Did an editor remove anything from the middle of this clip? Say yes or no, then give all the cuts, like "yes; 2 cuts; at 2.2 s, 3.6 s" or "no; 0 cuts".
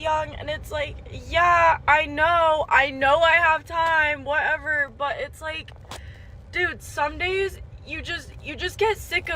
no; 0 cuts